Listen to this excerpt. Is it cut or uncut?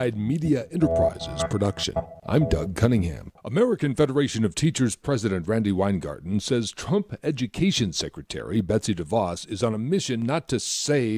uncut